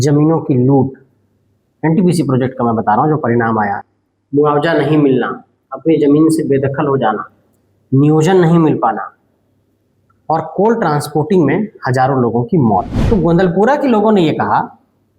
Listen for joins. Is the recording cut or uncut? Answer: cut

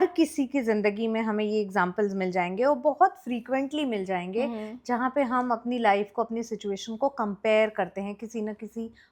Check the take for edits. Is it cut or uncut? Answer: uncut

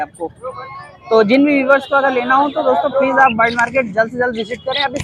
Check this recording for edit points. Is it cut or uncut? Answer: uncut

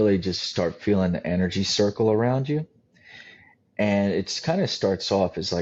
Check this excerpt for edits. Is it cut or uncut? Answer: uncut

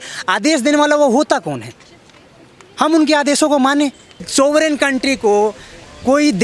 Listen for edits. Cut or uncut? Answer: cut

